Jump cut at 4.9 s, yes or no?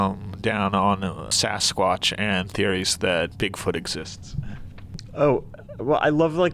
no